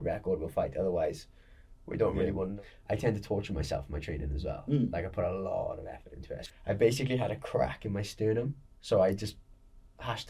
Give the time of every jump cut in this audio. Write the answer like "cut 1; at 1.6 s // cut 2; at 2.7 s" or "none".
cut 1; at 2.5 s // cut 2; at 6.4 s // cut 3; at 8.8 s